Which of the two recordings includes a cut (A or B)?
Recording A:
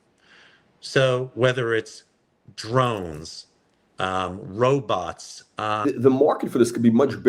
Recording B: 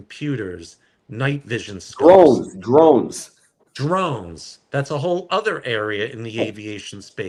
A